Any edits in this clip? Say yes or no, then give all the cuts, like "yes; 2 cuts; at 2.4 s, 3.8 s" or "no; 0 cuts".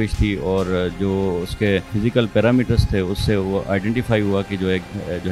yes; 1 cut; at 1.9 s